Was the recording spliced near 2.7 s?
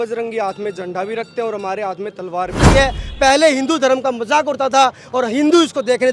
yes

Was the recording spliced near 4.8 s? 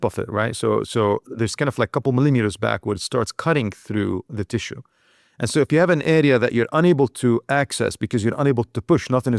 no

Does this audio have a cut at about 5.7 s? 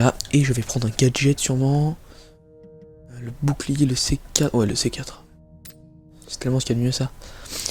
no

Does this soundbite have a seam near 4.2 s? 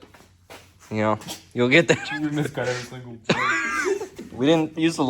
yes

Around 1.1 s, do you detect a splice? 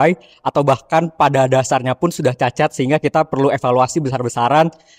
no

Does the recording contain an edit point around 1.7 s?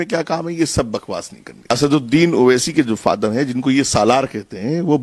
yes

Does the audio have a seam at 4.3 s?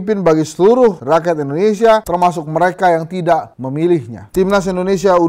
yes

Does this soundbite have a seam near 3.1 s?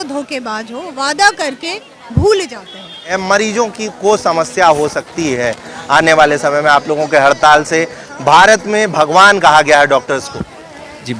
yes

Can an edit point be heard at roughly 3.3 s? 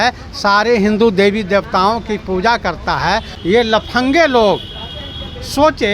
yes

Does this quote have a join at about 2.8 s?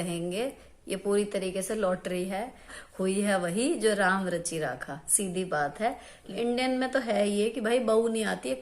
yes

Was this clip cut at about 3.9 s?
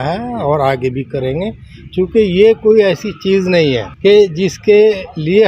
yes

